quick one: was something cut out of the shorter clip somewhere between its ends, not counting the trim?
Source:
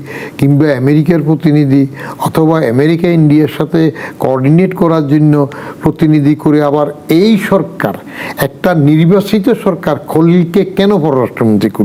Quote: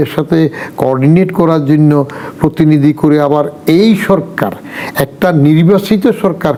no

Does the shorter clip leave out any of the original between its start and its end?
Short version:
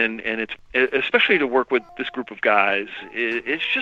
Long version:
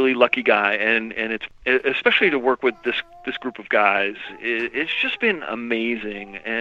yes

